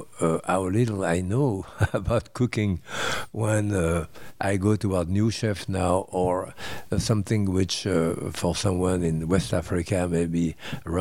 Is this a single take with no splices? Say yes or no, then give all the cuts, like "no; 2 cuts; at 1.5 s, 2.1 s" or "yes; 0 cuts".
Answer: yes; 0 cuts